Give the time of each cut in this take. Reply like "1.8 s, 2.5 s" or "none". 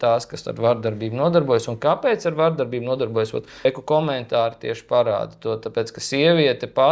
none